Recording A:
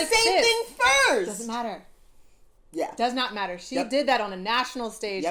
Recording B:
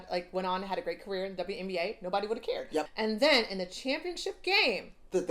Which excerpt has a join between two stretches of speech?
B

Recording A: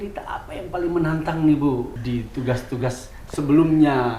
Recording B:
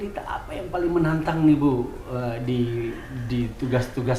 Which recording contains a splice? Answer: A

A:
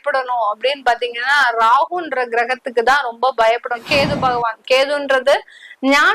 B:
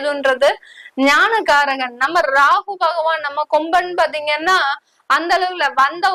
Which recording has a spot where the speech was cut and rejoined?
A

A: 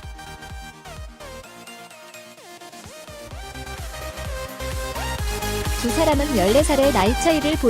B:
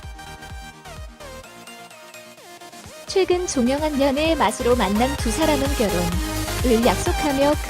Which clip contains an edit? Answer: B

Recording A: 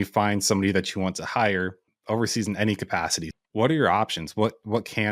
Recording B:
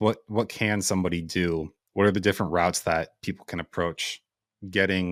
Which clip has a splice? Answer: A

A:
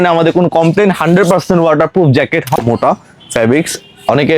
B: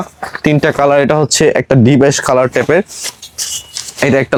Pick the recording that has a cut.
A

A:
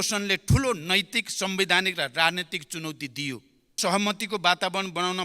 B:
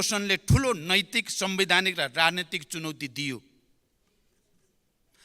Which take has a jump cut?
A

